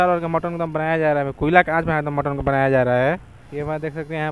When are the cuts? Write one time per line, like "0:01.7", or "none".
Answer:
0:03.4